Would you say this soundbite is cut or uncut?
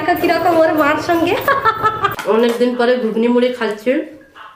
cut